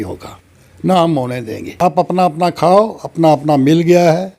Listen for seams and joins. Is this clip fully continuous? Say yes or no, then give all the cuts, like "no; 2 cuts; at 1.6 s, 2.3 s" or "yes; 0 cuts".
no; 1 cut; at 1.8 s